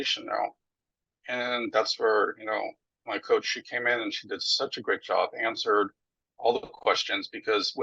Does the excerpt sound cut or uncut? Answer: uncut